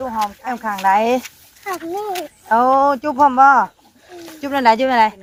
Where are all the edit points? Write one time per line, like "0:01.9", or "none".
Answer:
none

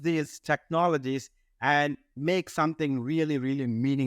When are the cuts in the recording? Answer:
none

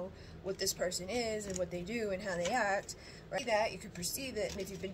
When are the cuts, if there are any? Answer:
0:03.4

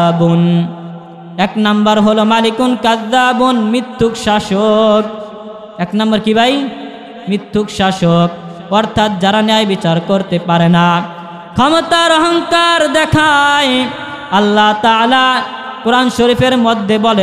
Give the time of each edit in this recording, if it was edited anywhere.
none

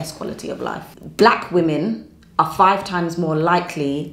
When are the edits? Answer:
0:01.0

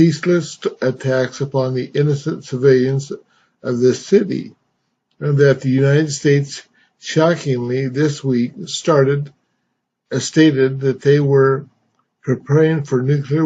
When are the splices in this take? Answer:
none

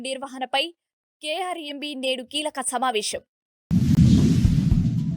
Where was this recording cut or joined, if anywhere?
0:04.0

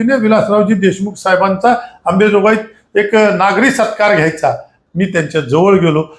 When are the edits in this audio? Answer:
0:04.7

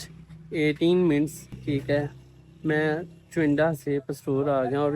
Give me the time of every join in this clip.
0:01.5

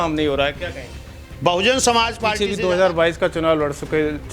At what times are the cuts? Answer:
0:02.4

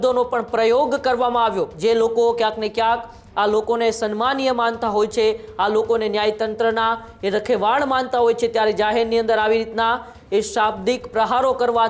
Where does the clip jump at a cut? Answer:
0:01.7

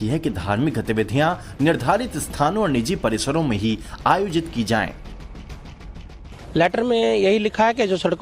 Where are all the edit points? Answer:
none

